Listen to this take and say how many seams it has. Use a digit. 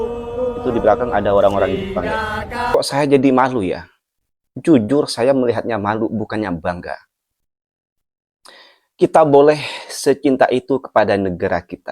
1